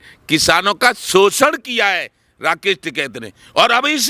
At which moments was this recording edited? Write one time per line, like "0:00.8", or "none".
none

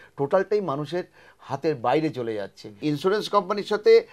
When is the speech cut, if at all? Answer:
0:02.8

